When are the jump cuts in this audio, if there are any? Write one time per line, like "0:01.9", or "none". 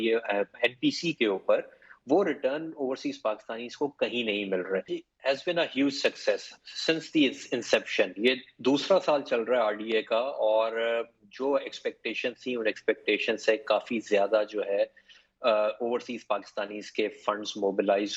0:04.9